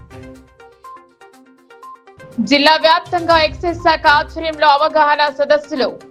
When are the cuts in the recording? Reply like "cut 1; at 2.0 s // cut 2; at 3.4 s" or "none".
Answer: none